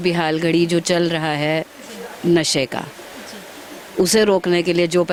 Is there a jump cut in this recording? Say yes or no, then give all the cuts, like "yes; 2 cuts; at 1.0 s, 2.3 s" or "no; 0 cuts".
no; 0 cuts